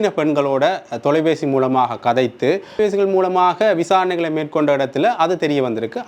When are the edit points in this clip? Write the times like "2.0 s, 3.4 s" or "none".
2.8 s